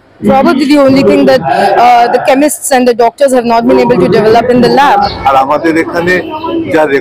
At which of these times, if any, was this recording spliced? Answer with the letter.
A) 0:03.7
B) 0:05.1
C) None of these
B